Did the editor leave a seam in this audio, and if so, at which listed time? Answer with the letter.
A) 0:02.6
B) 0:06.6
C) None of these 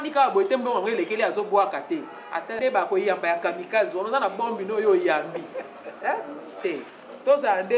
A